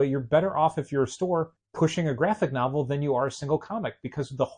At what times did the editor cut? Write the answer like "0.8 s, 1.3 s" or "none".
1.6 s

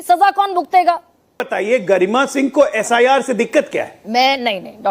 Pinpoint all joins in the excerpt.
1.5 s

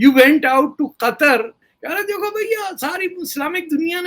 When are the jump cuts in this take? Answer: 1.7 s

